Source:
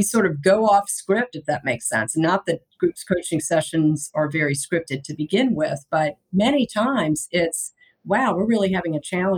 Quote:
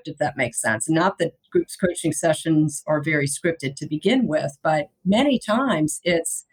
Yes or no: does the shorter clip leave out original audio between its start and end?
no